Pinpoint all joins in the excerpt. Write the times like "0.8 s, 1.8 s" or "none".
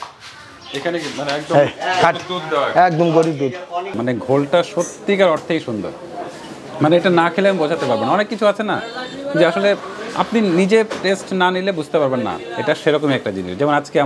3.9 s